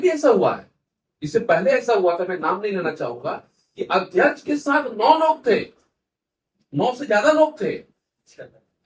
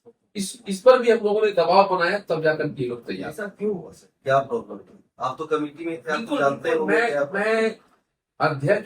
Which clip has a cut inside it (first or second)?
second